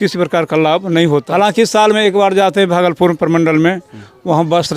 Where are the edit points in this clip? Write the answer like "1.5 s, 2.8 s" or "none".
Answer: 1.3 s